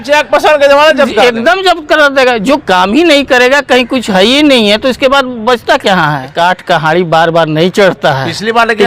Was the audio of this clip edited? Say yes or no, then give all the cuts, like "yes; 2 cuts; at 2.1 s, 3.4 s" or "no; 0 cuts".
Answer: yes; 1 cut; at 6.3 s